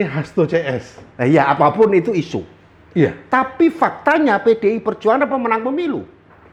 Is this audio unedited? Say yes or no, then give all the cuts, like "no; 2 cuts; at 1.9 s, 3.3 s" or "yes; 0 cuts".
yes; 0 cuts